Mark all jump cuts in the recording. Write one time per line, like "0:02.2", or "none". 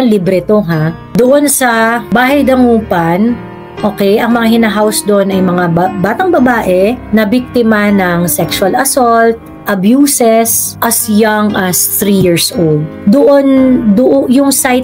0:01.1
0:02.0
0:07.0
0:10.6
0:12.9